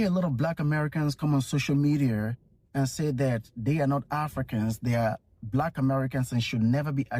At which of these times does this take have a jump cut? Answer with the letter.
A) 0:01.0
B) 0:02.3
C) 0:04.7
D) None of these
B